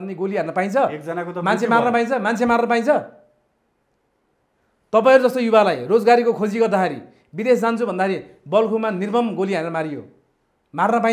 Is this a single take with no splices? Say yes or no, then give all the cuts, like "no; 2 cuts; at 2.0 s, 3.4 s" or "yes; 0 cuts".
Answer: yes; 0 cuts